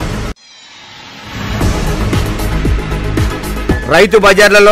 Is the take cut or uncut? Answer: uncut